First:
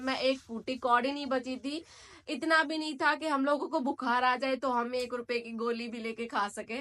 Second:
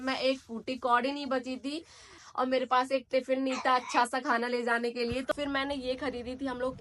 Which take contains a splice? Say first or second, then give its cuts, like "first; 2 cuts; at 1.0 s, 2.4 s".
second; 2 cuts; at 2.2 s, 5.3 s